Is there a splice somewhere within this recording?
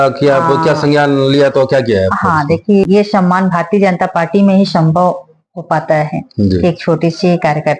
yes; 1 cut; at 2.9 s

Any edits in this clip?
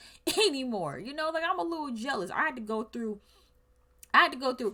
no; 0 cuts

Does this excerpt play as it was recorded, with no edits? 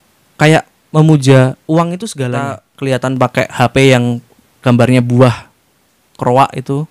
no; 1 cut; at 2.7 s

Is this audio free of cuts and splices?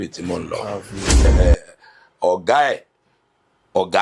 no; 1 cut; at 1.3 s

